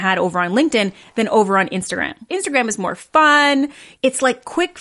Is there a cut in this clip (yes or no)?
yes